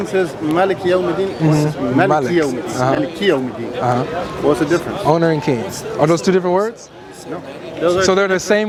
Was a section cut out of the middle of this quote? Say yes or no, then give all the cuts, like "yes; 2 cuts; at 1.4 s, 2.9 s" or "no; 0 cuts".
no; 0 cuts